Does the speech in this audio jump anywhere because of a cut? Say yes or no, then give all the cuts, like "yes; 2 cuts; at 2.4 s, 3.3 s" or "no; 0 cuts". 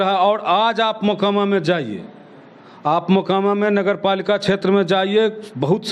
no; 0 cuts